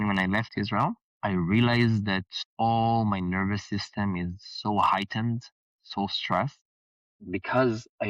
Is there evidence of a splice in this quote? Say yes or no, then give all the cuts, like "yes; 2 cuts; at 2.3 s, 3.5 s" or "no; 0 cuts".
yes; 2 cuts; at 1.1 s, 2.4 s